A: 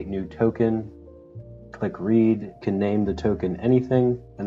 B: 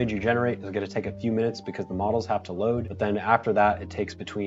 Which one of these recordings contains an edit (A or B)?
B